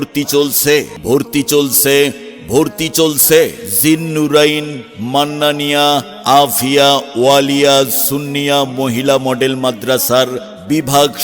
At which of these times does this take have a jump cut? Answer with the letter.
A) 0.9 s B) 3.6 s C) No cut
A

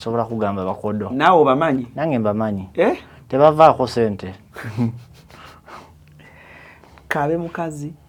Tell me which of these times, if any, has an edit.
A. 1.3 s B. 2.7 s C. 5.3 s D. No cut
D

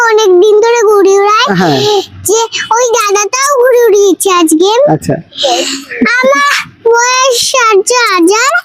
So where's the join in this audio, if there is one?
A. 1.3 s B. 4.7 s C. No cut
C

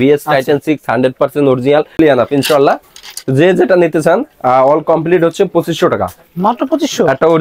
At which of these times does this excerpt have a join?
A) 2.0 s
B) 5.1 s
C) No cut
A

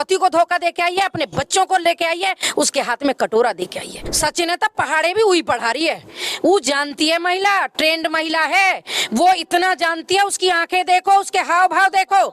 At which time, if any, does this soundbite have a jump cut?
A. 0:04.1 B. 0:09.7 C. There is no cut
A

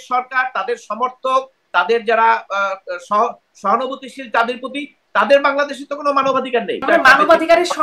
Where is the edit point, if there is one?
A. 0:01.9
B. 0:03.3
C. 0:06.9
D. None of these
C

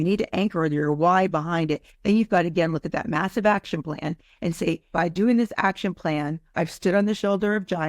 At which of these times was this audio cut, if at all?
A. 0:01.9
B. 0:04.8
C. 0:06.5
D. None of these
B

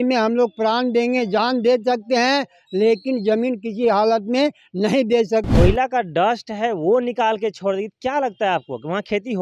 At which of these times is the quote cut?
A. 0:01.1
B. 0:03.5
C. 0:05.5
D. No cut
C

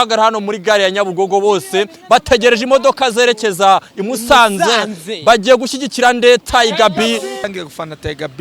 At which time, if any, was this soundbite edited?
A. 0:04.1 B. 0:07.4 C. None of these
B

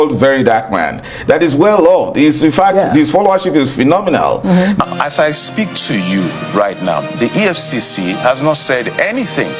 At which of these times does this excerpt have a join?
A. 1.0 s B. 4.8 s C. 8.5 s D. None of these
B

